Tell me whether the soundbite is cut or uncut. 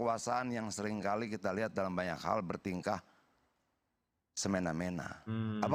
uncut